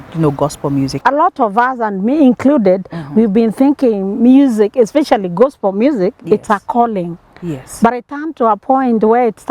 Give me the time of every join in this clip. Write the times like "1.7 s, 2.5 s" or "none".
0.9 s